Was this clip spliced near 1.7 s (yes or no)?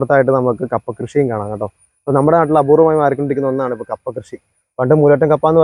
no